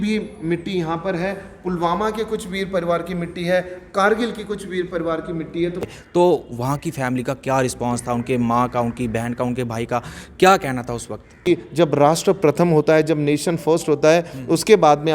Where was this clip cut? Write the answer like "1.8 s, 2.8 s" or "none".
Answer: 5.9 s, 11.5 s